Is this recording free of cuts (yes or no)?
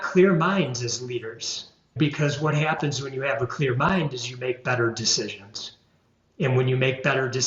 no